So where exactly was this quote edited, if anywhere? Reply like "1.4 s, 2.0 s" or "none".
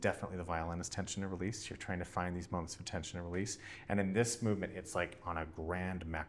none